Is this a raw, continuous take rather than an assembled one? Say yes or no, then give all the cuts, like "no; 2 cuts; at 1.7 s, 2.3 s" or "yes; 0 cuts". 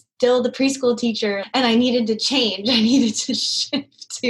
no; 1 cut; at 1.4 s